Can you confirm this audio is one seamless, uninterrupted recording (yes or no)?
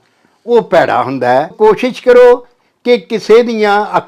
no